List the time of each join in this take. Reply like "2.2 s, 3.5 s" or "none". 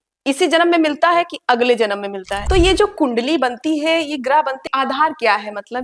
2.3 s, 4.6 s